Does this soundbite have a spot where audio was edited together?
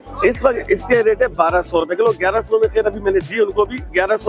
no; 0 cuts

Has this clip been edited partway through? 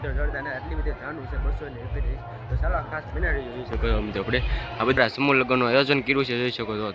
no; 0 cuts

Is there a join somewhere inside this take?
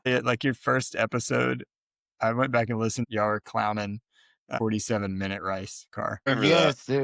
yes; 3 cuts; at 3.0 s, 4.6 s, 6.3 s

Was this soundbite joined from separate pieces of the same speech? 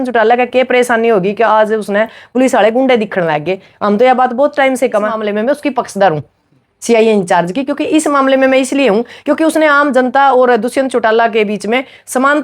yes; 1 cut; at 5.2 s

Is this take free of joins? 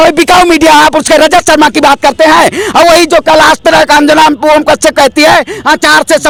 yes; 0 cuts

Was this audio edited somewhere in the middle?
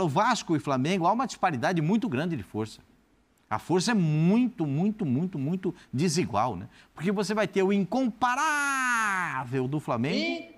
no; 0 cuts

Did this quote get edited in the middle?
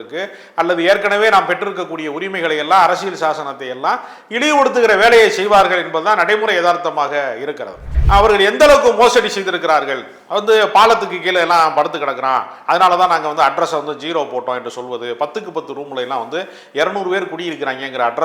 yes; 1 cut; at 7.9 s

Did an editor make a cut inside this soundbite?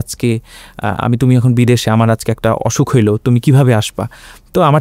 no; 0 cuts

